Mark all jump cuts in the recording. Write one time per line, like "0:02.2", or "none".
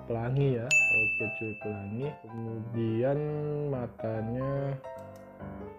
0:02.4